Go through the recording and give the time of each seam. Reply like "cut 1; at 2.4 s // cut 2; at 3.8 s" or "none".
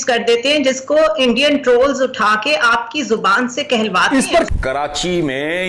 cut 1; at 4.6 s